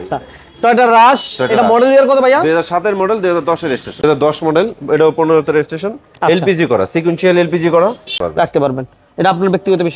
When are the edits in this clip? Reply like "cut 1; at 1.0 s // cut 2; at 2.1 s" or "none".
cut 1; at 4.0 s // cut 2; at 8.2 s